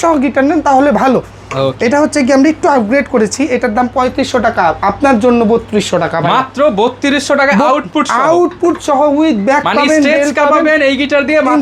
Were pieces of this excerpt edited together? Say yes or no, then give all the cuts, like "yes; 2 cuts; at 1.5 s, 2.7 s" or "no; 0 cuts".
no; 0 cuts